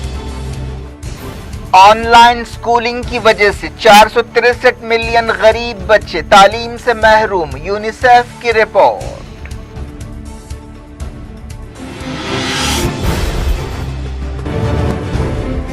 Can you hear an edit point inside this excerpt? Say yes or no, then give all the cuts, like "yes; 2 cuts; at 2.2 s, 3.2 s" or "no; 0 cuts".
no; 0 cuts